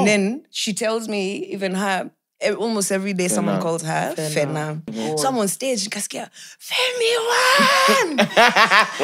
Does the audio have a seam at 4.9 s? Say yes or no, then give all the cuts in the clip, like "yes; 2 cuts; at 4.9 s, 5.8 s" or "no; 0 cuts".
yes; 1 cut; at 4.9 s